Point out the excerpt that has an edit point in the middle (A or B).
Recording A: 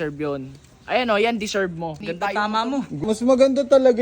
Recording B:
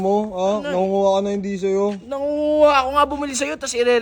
A